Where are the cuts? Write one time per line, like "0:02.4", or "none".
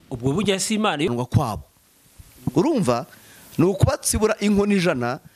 0:01.1